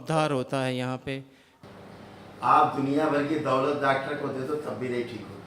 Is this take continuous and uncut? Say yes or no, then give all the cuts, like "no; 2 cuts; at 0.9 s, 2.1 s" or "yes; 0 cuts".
no; 1 cut; at 1.5 s